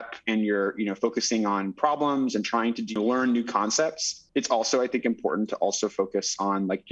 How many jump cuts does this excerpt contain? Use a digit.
2